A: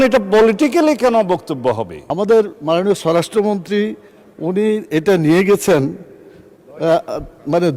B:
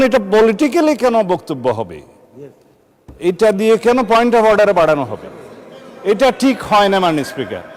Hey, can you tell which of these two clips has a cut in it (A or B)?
A